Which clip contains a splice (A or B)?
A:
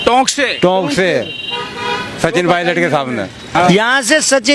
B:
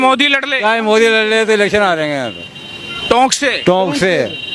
A